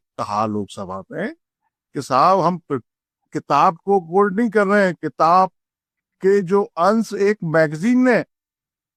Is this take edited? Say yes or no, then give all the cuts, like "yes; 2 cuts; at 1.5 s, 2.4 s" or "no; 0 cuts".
no; 0 cuts